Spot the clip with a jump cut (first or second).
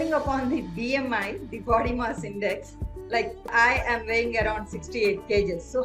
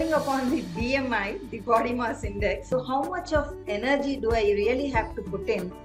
second